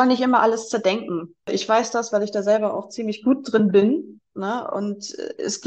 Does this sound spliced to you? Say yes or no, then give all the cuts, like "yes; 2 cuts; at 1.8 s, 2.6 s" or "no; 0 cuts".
yes; 1 cut; at 1.5 s